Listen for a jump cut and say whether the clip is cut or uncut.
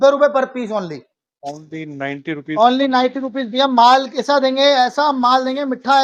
uncut